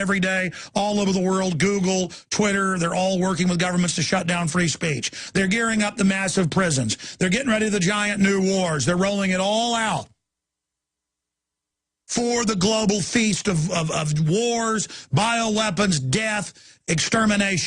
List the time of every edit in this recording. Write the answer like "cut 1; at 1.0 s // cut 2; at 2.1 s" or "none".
none